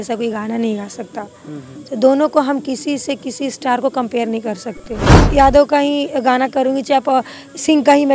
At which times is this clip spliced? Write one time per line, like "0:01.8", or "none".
0:05.1